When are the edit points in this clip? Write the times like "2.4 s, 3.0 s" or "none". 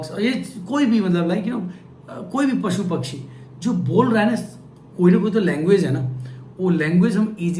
none